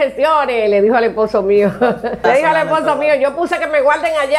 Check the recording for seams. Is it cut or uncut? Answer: cut